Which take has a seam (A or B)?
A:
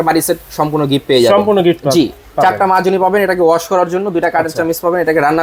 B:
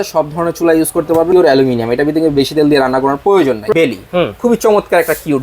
B